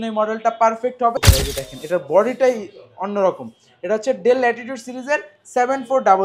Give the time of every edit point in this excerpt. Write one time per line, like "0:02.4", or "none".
0:01.1